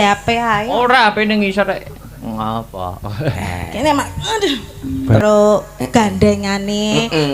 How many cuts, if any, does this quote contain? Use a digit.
1